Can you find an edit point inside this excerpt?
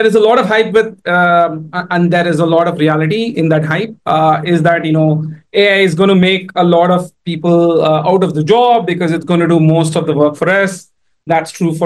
no; 0 cuts

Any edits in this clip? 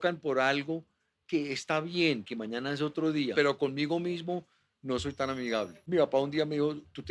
yes; 2 cuts; at 3.3 s, 5.9 s

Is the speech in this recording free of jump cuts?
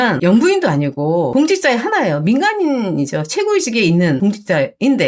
no; 1 cut; at 4.2 s

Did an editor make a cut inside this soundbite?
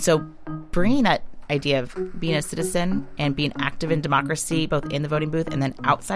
yes; 1 cut; at 3.0 s

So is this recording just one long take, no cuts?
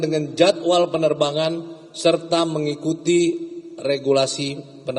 yes; 0 cuts

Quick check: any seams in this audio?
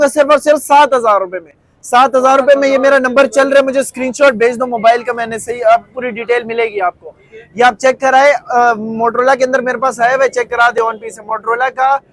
no; 0 cuts

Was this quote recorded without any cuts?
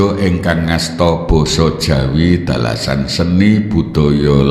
yes; 0 cuts

